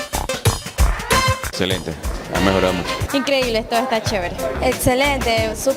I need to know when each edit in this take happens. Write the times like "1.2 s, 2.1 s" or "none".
1.4 s